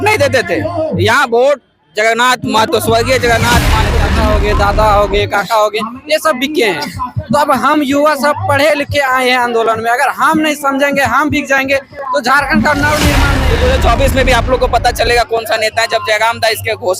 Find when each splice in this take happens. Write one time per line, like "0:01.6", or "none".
0:04.0
0:13.4